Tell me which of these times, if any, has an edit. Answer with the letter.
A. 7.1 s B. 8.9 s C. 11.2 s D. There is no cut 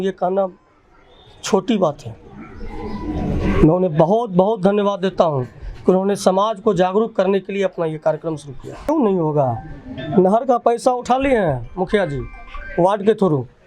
B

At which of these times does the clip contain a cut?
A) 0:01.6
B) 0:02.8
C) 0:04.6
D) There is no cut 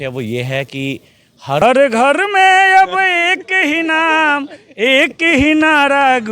A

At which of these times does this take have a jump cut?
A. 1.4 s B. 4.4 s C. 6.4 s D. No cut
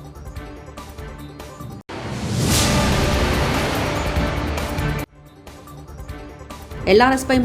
C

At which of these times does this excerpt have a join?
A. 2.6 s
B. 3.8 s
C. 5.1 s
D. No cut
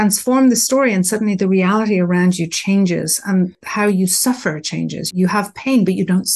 C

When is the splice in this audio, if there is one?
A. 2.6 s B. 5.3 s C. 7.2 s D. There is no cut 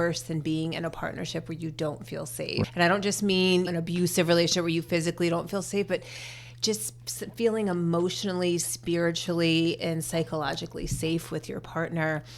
A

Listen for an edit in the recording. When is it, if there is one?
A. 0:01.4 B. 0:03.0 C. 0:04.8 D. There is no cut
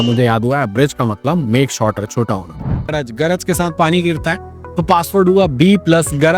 B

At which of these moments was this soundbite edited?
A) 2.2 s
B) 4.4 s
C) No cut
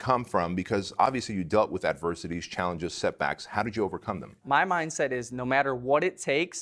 B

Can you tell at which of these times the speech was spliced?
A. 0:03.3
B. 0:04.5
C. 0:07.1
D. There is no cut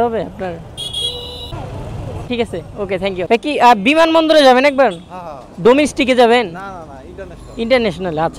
A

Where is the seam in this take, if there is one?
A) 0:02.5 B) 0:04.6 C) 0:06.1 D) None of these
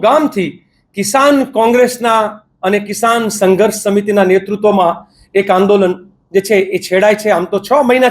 D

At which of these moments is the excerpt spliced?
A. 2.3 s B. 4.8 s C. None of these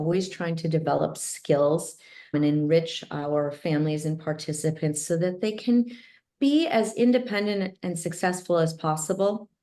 A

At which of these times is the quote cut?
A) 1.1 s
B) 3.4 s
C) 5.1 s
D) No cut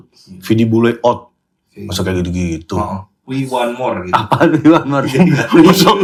D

